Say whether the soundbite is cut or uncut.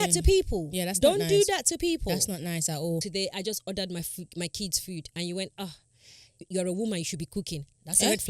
cut